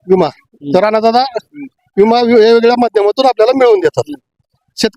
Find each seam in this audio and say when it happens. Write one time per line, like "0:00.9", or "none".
none